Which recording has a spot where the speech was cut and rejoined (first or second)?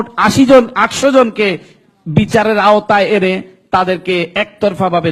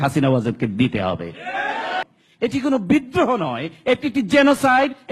second